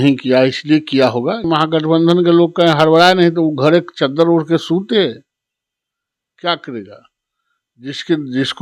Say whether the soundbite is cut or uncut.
cut